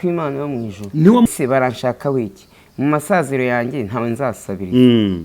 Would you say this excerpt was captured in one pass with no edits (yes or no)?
no